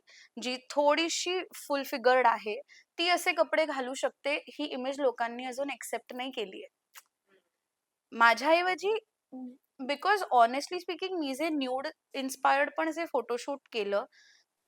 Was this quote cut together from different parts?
no; 0 cuts

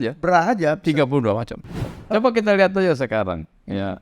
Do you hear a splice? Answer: yes; 1 cut; at 1.9 s

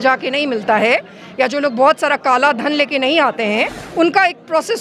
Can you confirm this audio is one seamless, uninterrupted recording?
no; 1 cut; at 3.8 s

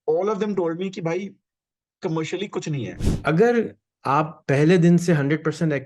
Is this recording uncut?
no; 1 cut; at 3.0 s

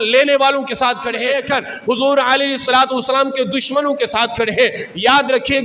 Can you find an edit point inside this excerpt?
yes; 1 cut; at 1.3 s

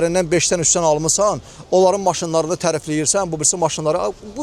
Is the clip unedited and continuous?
yes; 0 cuts

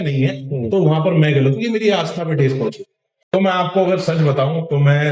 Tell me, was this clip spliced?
yes; 1 cut; at 3.3 s

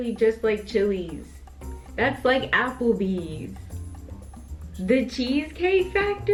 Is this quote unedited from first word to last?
yes; 0 cuts

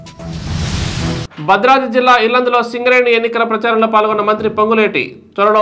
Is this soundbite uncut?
no; 1 cut; at 1.2 s

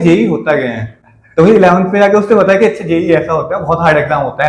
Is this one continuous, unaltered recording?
yes; 0 cuts

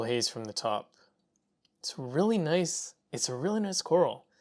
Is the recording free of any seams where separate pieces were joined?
yes; 0 cuts

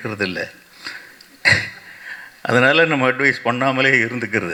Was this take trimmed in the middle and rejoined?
no; 0 cuts

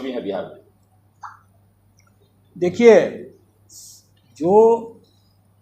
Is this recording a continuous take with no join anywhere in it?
yes; 0 cuts

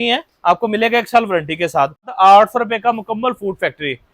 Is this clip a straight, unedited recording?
no; 1 cut; at 2.1 s

